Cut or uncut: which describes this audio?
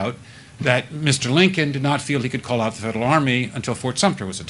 uncut